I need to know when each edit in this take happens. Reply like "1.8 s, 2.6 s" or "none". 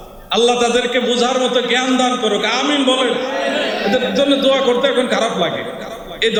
none